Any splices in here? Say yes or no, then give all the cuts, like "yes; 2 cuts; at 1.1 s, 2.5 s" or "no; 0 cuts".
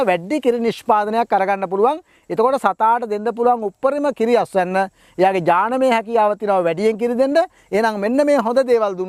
no; 0 cuts